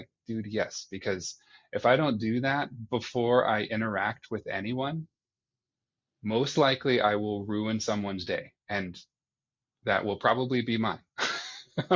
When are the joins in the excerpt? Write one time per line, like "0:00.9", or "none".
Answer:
none